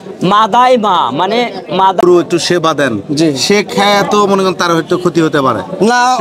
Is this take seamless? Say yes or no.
no